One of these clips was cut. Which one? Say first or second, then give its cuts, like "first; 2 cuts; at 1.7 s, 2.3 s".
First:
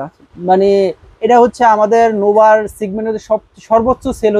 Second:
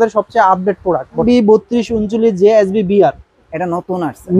second; 1 cut; at 1.2 s